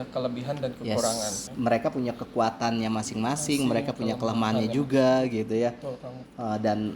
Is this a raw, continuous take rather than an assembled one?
no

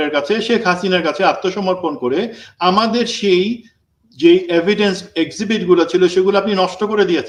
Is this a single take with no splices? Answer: yes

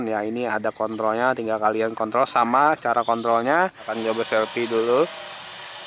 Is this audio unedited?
no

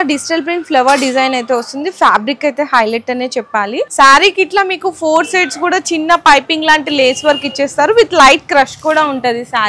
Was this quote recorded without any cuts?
no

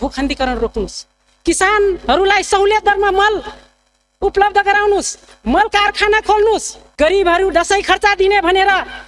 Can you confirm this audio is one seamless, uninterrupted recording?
no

